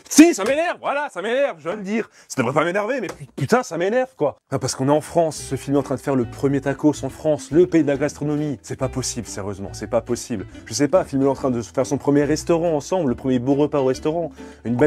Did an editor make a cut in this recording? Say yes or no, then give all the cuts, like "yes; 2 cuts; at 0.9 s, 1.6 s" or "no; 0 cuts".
no; 0 cuts